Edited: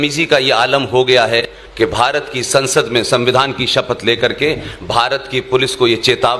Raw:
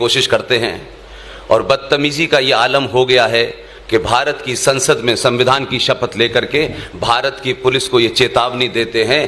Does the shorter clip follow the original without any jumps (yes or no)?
no